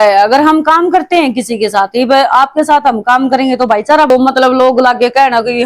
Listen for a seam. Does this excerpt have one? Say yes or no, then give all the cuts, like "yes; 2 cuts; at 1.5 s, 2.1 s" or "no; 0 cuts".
yes; 1 cut; at 4.1 s